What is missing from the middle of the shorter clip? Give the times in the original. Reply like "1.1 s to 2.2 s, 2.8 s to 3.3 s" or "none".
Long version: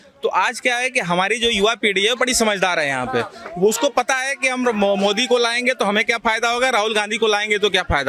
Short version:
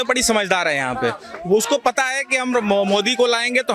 none